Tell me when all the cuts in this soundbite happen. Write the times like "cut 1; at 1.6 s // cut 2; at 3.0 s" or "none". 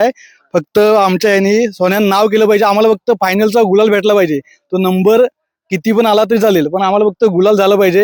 none